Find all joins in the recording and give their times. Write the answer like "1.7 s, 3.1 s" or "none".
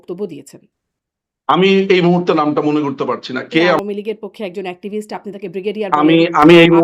3.8 s